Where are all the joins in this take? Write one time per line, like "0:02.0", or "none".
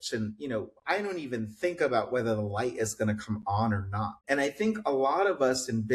0:04.2